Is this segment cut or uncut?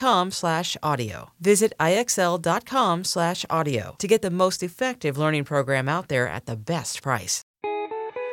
cut